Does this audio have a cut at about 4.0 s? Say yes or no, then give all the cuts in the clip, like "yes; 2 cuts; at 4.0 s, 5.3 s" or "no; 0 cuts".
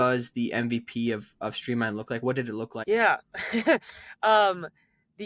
no; 1 cut; at 2.8 s